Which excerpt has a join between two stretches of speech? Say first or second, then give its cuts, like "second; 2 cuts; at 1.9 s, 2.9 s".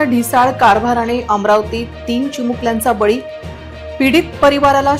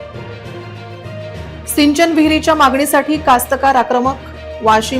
second; 1 cut; at 1.3 s